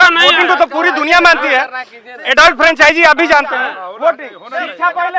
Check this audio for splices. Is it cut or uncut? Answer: uncut